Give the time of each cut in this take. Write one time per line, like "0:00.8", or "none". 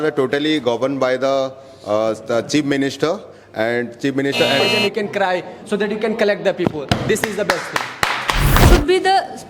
0:04.6
0:08.6